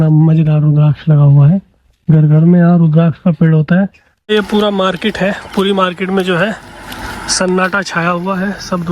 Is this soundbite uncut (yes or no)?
no